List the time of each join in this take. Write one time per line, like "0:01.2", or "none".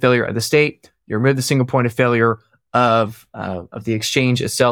none